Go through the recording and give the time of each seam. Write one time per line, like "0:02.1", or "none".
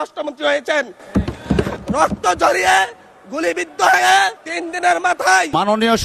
none